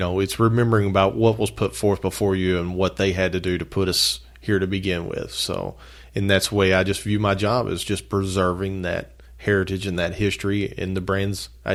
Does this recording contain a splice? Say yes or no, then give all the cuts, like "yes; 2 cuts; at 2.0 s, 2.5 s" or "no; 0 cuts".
no; 0 cuts